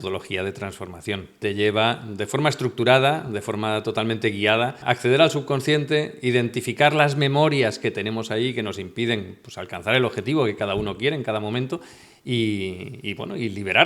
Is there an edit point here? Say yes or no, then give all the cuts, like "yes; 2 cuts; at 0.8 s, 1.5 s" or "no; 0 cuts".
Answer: yes; 2 cuts; at 1.4 s, 4.8 s